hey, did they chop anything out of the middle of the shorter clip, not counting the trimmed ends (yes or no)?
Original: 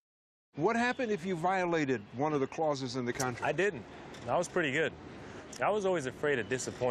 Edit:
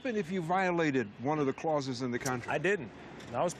no